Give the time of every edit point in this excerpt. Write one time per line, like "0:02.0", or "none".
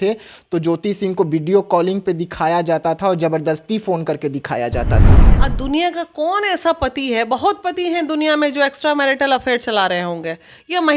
0:05.2